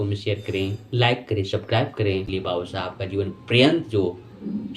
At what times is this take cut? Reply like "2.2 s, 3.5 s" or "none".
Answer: 2.3 s